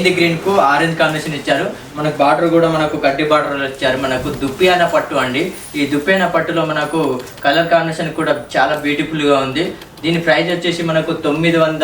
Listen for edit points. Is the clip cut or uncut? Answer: uncut